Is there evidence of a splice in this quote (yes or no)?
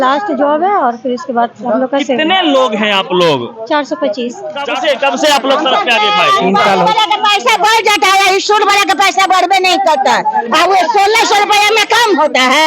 yes